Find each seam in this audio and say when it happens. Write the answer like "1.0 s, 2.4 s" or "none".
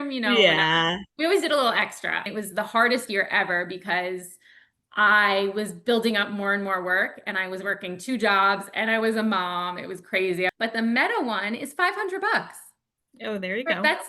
2.3 s, 10.5 s